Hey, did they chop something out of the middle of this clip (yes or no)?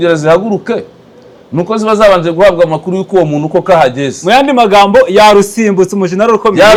no